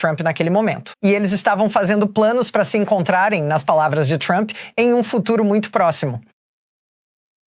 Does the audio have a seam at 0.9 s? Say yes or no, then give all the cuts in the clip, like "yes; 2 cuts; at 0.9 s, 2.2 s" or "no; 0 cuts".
no; 0 cuts